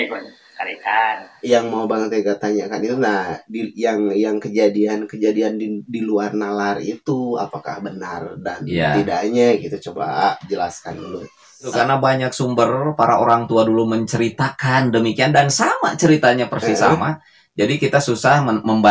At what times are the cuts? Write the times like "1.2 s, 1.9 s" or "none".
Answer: 1.3 s, 11.7 s